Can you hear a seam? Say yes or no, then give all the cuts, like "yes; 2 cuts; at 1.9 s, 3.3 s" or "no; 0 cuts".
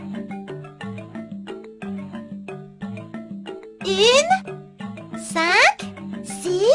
yes; 1 cut; at 1.6 s